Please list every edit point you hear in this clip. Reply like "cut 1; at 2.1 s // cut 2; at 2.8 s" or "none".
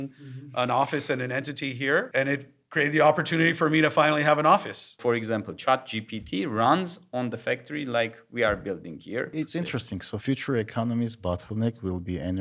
cut 1; at 2.1 s // cut 2; at 5.0 s // cut 3; at 9.7 s